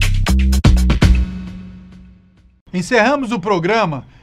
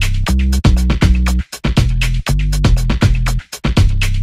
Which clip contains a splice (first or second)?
second